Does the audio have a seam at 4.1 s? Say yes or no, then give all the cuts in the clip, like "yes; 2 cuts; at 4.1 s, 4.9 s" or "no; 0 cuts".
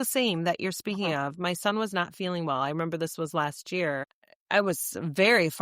yes; 1 cut; at 4.1 s